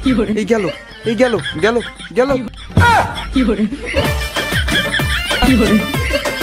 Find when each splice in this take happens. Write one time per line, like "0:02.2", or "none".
0:02.6

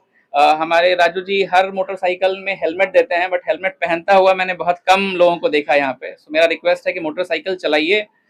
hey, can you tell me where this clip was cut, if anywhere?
none

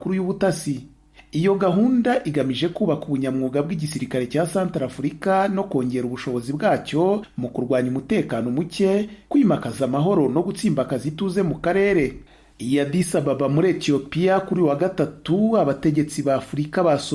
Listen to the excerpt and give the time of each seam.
none

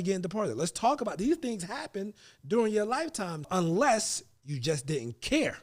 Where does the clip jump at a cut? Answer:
0:03.5

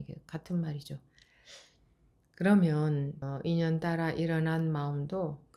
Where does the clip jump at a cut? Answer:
0:03.2

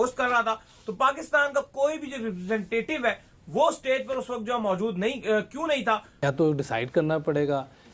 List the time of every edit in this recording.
0:06.1

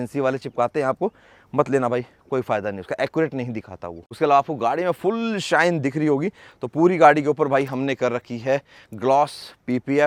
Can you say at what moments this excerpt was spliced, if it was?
none

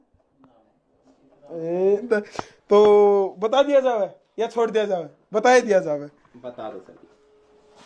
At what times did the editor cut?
0:02.1

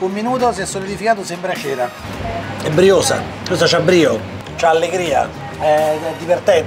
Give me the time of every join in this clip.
0:02.0
0:05.4

